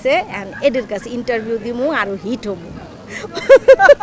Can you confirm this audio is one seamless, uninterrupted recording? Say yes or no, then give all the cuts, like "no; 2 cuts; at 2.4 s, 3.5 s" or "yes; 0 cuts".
yes; 0 cuts